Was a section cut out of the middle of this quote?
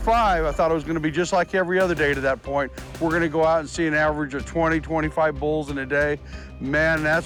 no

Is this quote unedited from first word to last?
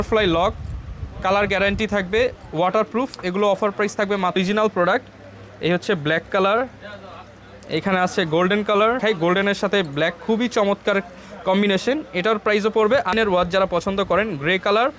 no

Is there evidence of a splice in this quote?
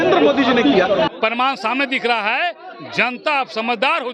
yes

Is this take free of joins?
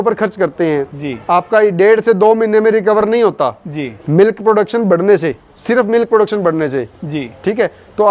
yes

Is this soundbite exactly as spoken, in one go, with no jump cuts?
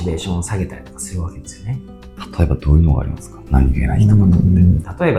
yes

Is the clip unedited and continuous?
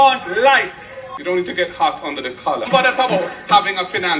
no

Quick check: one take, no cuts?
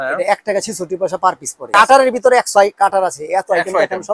no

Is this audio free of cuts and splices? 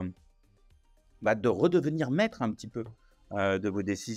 yes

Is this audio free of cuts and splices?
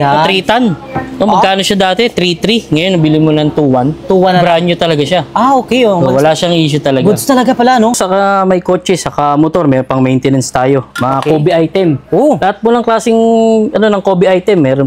no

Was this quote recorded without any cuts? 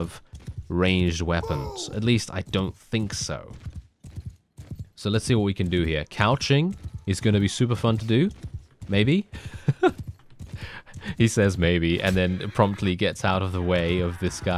yes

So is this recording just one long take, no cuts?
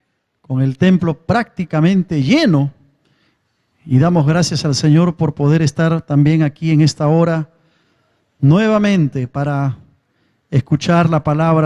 yes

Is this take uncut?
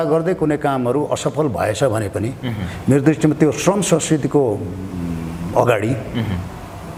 yes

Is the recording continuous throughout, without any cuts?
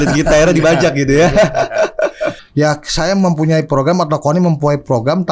no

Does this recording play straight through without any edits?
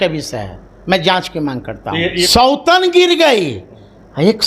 no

